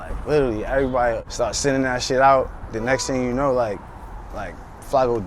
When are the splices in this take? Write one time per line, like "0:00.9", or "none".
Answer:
0:01.3